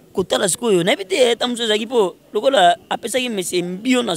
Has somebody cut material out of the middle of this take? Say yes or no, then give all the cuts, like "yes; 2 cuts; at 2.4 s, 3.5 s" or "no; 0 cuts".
no; 0 cuts